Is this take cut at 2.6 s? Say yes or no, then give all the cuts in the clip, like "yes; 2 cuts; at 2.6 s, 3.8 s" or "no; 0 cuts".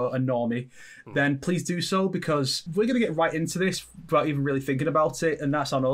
yes; 1 cut; at 2.6 s